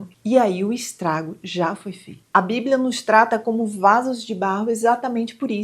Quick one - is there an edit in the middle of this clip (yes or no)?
yes